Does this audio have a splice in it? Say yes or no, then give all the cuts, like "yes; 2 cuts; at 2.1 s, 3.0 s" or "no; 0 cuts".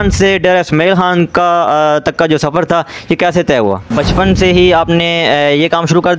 yes; 1 cut; at 3.9 s